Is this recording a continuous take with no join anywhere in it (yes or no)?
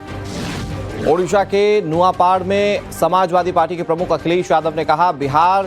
no